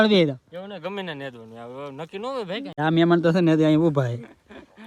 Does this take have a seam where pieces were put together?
yes; 1 cut; at 2.8 s

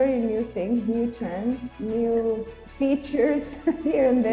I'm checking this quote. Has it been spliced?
no; 0 cuts

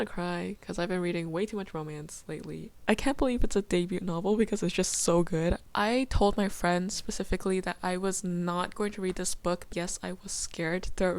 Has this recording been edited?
yes; 3 cuts; at 2.7 s, 5.6 s, 9.7 s

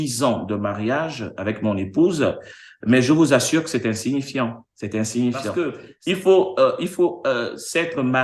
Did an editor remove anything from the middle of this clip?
yes; 1 cut; at 5.9 s

